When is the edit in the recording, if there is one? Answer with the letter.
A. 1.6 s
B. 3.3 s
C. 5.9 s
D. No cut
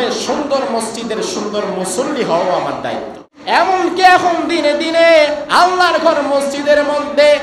B